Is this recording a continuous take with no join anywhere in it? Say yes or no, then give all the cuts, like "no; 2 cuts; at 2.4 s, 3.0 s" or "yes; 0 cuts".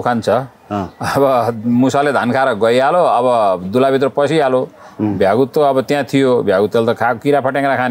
yes; 0 cuts